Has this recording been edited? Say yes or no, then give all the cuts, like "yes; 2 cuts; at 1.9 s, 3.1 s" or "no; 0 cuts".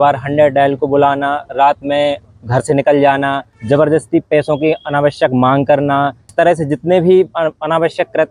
yes; 2 cuts; at 3.5 s, 6.2 s